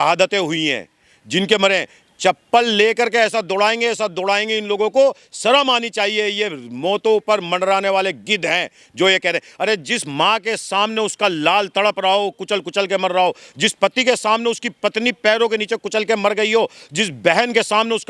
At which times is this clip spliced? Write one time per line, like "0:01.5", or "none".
none